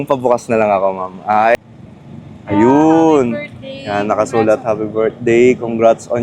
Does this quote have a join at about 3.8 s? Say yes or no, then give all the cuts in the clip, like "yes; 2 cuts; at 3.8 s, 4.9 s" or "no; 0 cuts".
no; 1 cut; at 1.6 s